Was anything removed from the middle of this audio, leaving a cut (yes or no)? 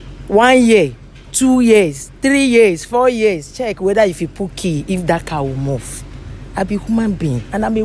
no